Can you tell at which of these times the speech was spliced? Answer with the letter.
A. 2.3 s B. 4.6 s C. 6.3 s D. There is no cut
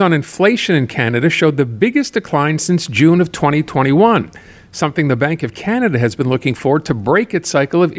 D